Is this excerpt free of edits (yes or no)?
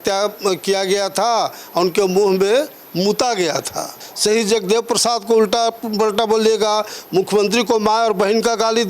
no